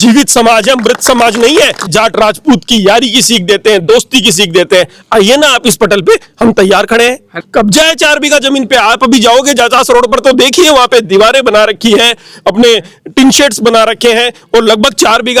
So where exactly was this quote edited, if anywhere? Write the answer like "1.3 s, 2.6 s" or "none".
1.9 s, 7.3 s